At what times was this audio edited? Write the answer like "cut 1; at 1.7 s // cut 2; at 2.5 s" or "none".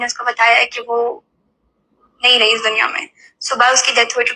none